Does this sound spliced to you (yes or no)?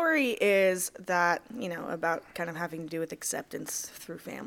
no